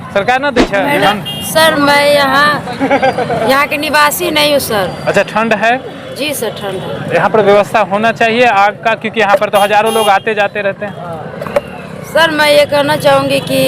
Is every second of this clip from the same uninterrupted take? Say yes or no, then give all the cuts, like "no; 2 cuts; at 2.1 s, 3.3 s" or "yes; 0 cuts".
no; 1 cut; at 0.9 s